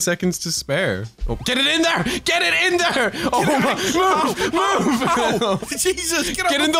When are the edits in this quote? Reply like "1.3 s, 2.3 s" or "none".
none